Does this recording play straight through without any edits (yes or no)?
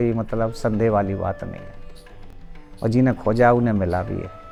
yes